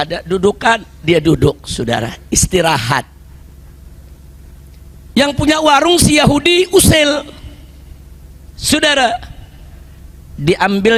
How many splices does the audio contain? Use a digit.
0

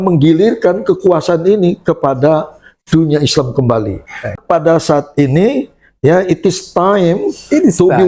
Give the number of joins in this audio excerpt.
1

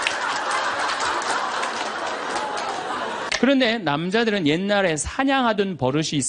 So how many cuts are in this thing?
1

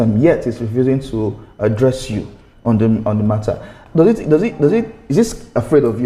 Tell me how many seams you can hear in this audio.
0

